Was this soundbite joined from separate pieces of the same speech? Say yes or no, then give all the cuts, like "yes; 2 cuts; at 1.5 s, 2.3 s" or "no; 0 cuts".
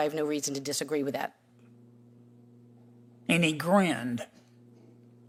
no; 0 cuts